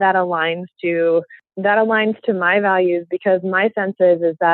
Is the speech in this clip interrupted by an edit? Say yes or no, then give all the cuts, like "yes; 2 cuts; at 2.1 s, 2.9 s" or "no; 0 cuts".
yes; 1 cut; at 1.4 s